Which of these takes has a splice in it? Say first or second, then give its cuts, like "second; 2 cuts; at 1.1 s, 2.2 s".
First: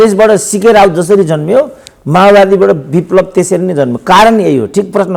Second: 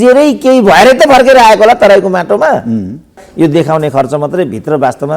second; 1 cut; at 3.2 s